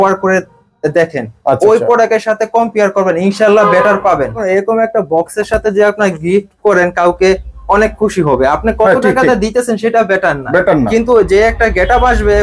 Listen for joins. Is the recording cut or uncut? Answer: cut